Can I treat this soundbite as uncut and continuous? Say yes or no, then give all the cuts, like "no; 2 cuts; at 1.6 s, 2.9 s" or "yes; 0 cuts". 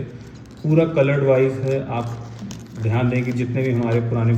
yes; 0 cuts